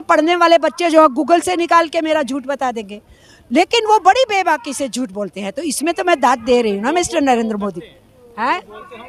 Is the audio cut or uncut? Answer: uncut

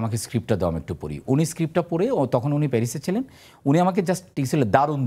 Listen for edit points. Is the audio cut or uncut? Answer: uncut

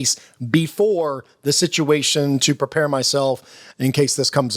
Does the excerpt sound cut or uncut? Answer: uncut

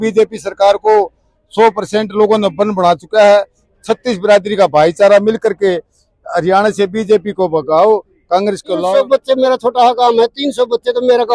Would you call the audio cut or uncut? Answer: cut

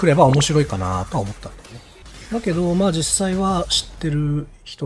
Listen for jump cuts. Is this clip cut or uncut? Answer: uncut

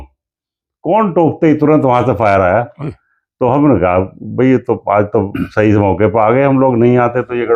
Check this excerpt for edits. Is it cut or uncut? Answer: uncut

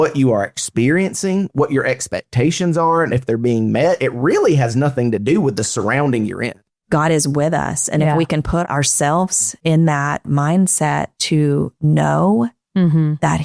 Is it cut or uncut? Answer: cut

